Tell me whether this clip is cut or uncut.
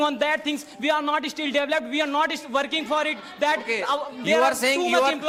uncut